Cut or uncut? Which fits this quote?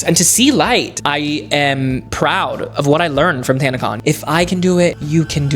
cut